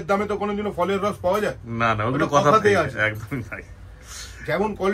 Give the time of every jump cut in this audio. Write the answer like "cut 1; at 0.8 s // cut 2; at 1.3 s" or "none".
none